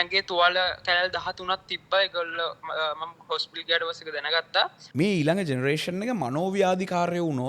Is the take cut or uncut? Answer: cut